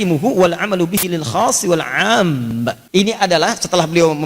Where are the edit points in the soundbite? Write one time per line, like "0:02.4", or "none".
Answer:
0:02.8